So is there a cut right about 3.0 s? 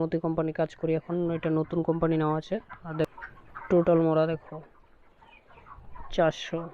yes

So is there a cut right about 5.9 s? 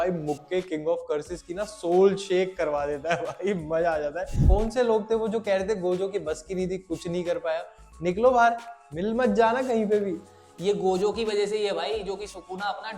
no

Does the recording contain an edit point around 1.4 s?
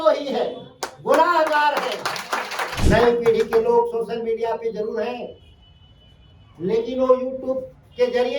no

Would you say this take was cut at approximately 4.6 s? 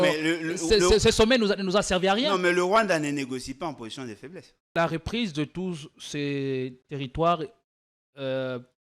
yes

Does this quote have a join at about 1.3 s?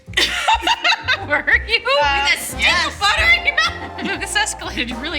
no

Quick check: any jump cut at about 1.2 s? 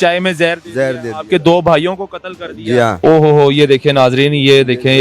no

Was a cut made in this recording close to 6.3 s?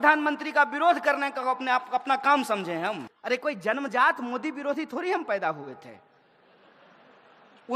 no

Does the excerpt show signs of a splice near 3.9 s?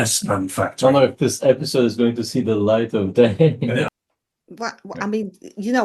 yes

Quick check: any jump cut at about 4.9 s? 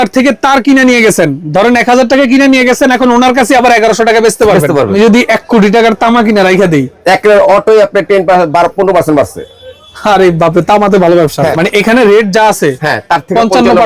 yes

